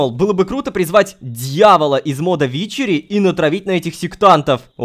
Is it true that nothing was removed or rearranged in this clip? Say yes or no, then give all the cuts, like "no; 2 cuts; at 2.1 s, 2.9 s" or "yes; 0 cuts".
yes; 0 cuts